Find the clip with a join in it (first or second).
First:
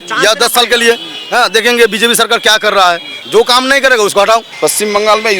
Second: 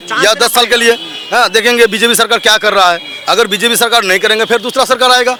first